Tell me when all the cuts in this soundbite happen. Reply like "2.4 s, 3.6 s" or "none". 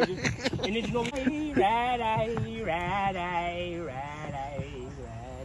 1.1 s